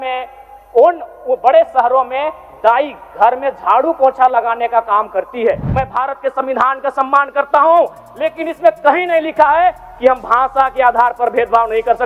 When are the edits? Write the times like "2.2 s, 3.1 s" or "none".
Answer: 5.7 s

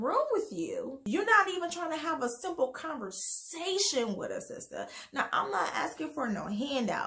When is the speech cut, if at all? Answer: 1.0 s

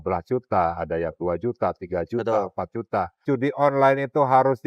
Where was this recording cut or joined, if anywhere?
3.2 s

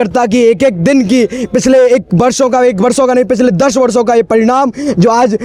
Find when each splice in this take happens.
none

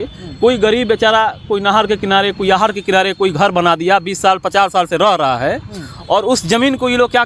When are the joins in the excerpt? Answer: none

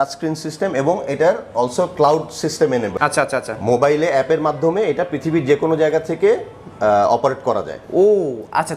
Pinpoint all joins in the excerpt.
none

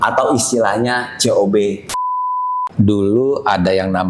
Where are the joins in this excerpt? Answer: 2.4 s

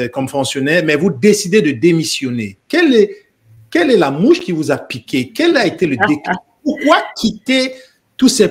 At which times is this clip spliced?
none

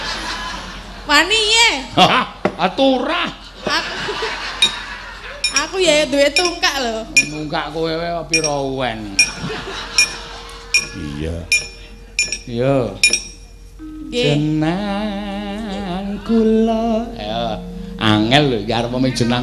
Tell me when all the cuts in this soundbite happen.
none

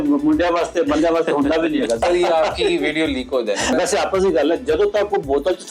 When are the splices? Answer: 2.0 s, 3.7 s

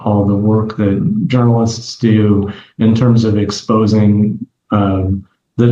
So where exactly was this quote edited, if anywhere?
none

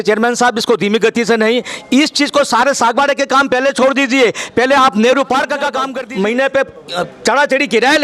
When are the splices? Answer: 5.9 s

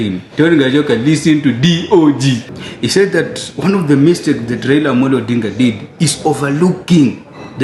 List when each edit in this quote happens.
2.5 s

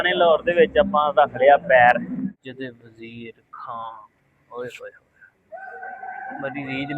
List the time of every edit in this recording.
2.2 s

